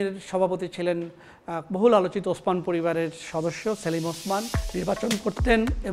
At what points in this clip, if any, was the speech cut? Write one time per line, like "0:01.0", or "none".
0:04.6